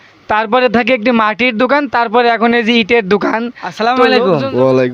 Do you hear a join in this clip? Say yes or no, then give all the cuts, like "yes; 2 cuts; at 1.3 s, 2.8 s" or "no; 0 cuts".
yes; 1 cut; at 3.9 s